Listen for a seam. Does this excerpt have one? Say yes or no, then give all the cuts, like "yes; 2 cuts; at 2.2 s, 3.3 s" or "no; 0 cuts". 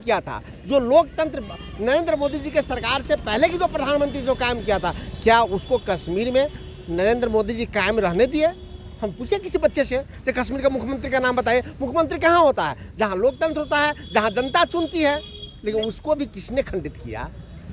no; 0 cuts